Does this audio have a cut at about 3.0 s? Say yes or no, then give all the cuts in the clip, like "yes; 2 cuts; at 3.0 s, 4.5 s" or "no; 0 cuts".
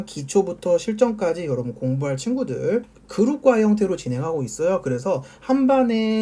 yes; 1 cut; at 3.0 s